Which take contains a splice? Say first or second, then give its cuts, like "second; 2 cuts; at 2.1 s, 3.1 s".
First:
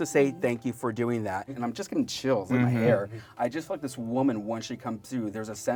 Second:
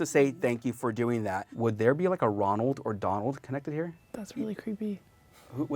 second; 2 cuts; at 1.5 s, 4.0 s